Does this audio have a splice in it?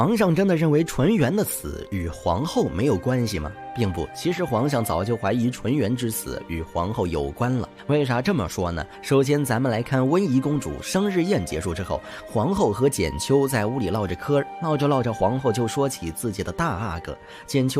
yes; 2 cuts; at 7.7 s, 8.9 s

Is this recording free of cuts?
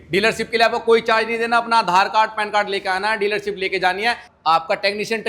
no; 1 cut; at 4.2 s

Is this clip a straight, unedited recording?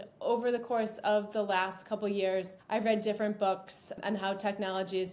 no; 2 cuts; at 2.6 s, 3.9 s

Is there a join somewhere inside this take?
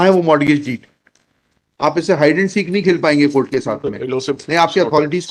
no; 0 cuts

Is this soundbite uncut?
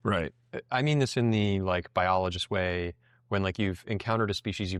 yes; 0 cuts

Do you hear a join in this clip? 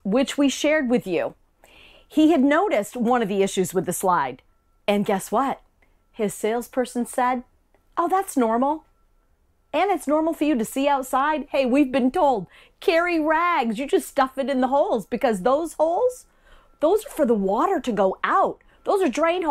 no; 0 cuts

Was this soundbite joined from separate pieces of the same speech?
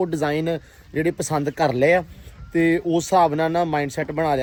no; 0 cuts

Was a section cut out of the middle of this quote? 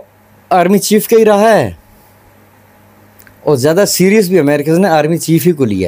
no; 0 cuts

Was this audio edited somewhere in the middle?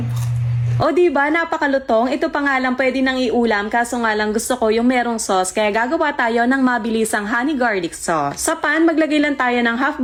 no; 0 cuts

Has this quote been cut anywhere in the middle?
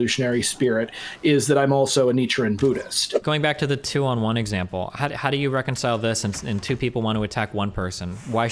yes; 1 cut; at 3.2 s

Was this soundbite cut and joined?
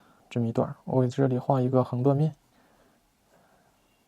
yes; 1 cut; at 2.5 s

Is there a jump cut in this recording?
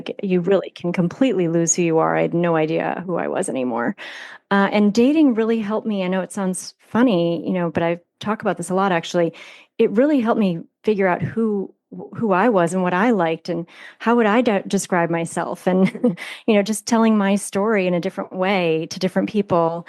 no; 0 cuts

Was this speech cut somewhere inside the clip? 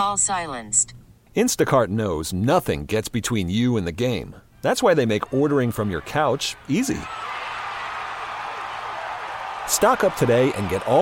no; 0 cuts

